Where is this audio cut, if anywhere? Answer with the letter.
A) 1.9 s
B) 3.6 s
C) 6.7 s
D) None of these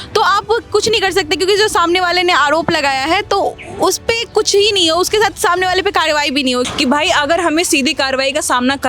C